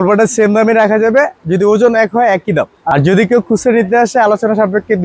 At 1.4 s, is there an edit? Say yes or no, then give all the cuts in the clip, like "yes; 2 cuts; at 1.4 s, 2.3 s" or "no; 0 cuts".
no; 1 cut; at 2.8 s